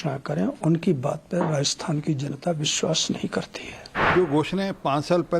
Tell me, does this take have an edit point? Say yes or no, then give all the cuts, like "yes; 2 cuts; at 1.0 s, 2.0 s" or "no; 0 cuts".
yes; 1 cut; at 4.0 s